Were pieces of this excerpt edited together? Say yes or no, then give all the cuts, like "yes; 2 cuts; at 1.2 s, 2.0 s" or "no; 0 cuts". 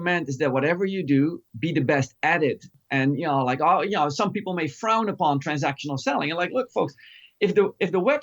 yes; 1 cut; at 2.7 s